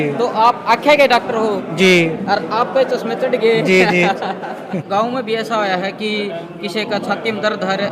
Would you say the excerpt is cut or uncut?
cut